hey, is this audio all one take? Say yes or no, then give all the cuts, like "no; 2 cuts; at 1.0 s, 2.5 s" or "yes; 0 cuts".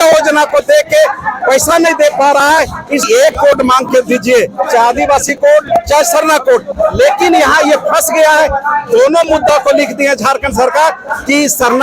no; 1 cut; at 3.0 s